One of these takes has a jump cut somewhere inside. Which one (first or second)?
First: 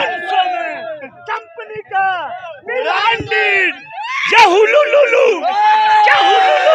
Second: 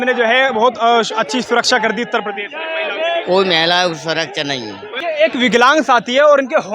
second